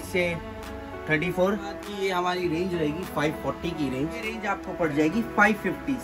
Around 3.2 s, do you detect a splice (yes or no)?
no